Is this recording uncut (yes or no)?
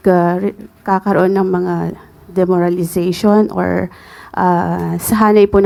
yes